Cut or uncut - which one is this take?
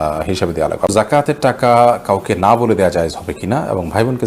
cut